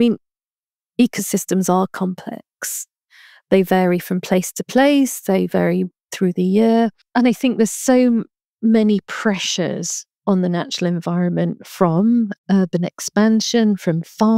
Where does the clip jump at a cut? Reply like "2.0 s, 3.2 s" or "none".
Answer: 7.0 s, 12.4 s